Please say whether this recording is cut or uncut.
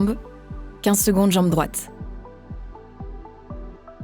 cut